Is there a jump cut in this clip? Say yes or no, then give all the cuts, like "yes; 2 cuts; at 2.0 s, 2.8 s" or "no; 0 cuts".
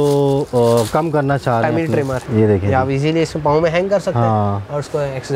yes; 1 cut; at 2.2 s